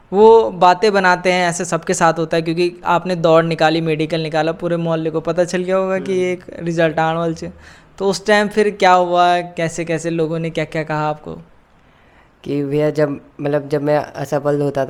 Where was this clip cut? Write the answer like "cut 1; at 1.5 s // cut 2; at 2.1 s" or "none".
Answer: none